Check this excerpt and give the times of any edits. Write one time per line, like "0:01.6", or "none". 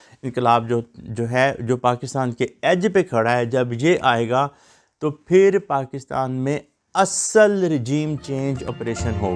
none